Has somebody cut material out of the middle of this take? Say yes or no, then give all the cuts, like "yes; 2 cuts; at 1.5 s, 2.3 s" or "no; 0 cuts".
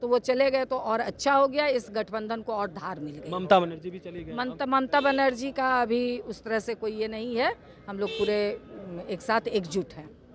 no; 0 cuts